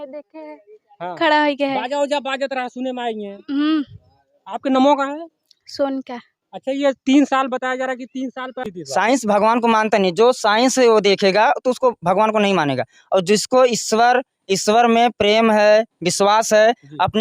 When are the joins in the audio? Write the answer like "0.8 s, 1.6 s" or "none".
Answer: 8.7 s